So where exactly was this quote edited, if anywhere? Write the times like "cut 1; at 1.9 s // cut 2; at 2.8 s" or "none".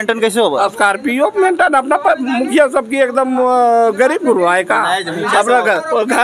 none